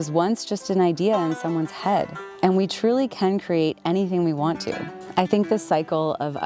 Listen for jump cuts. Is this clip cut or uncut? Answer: uncut